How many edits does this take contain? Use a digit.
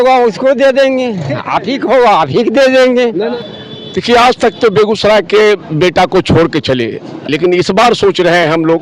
1